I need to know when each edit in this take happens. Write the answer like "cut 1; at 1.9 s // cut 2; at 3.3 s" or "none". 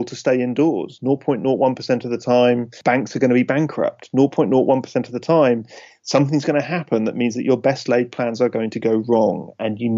cut 1; at 2.7 s